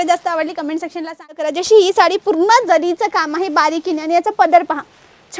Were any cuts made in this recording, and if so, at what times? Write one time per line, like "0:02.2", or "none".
0:01.5